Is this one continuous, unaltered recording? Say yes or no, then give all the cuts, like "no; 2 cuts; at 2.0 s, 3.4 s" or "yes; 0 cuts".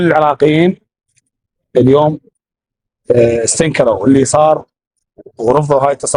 yes; 0 cuts